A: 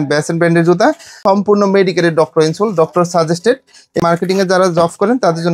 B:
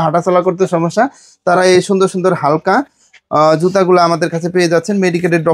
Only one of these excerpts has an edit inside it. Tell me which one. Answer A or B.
A